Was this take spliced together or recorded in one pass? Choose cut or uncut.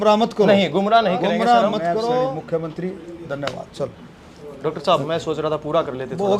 cut